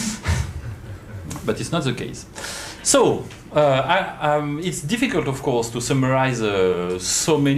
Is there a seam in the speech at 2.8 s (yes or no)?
no